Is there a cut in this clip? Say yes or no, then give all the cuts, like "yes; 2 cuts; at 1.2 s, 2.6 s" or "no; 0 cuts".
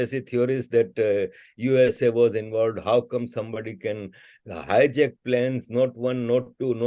no; 0 cuts